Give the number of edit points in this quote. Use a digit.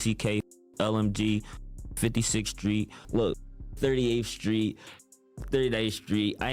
1